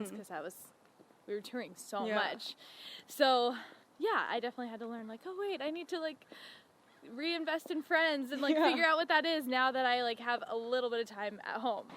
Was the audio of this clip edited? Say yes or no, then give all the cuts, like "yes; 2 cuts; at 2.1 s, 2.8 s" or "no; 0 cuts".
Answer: no; 0 cuts